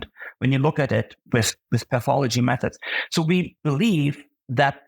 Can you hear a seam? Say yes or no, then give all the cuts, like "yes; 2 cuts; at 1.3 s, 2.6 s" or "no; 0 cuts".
yes; 1 cut; at 3.5 s